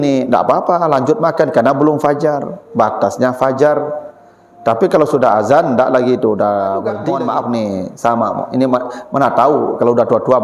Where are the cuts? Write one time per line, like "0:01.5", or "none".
0:07.0